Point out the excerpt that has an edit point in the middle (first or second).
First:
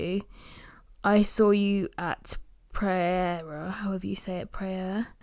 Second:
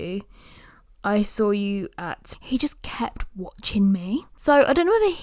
second